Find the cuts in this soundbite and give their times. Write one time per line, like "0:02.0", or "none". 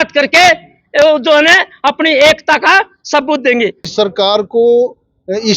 0:03.9